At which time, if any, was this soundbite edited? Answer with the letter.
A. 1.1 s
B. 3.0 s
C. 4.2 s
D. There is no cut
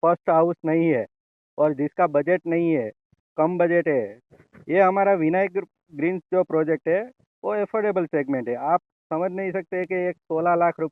C